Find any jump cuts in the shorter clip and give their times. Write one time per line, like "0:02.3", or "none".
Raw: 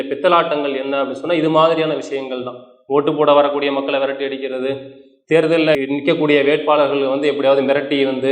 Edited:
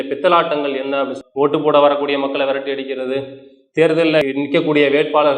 0:01.2